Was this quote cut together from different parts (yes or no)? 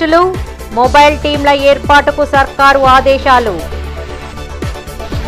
no